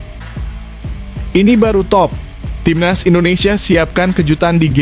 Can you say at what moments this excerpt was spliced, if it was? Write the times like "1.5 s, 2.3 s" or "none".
1.3 s